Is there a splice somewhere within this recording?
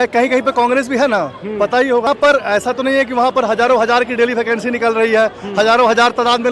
yes; 1 cut; at 2.1 s

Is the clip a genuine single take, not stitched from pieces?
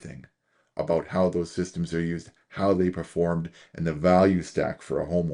yes; 0 cuts

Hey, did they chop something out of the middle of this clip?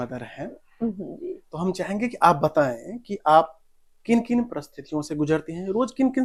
no; 0 cuts

